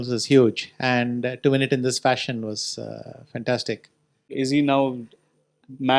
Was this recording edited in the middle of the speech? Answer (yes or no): yes